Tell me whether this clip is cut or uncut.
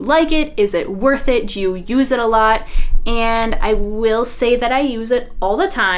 uncut